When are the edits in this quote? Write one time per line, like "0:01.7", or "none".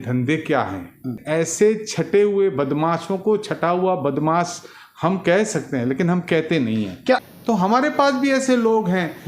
0:01.2
0:07.2